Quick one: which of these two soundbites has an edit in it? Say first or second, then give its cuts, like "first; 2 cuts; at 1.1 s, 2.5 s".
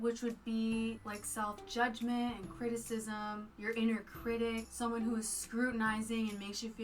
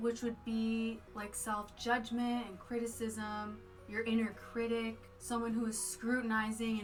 first; 3 cuts; at 1.0 s, 3.5 s, 4.7 s